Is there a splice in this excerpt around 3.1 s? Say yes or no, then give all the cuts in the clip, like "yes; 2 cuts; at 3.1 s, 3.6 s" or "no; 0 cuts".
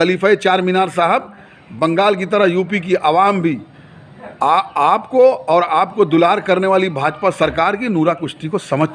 no; 0 cuts